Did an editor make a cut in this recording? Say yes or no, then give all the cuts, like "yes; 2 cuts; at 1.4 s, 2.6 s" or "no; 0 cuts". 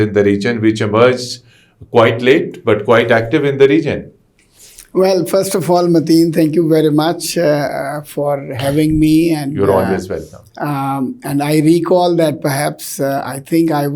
no; 0 cuts